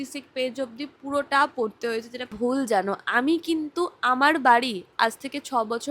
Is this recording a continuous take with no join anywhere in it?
no; 1 cut; at 2.3 s

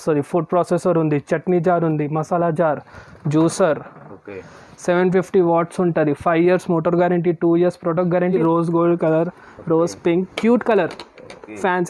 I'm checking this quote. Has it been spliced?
yes; 1 cut; at 8.4 s

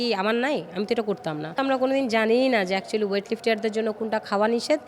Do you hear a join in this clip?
yes; 1 cut; at 1.6 s

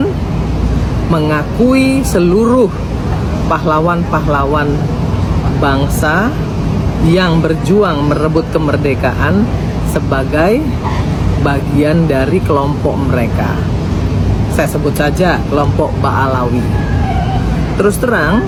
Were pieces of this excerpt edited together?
no; 0 cuts

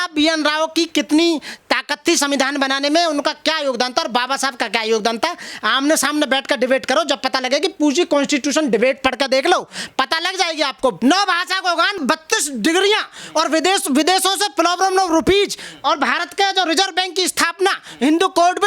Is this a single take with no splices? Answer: no; 2 cuts; at 11.0 s, 12.0 s

